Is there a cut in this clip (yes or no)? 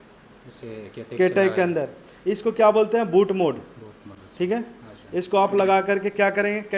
no